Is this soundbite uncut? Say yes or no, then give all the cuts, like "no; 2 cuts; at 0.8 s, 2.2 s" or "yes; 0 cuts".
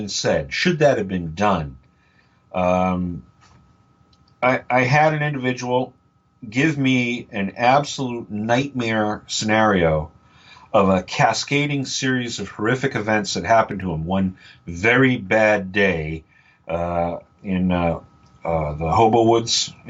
yes; 0 cuts